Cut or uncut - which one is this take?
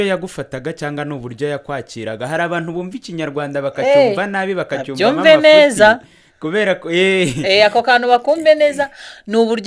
uncut